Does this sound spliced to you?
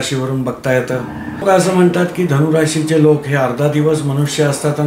yes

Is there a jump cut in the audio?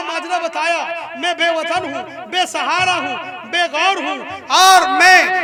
no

